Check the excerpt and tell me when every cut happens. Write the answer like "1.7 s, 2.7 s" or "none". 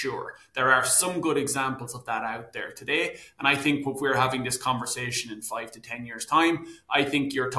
none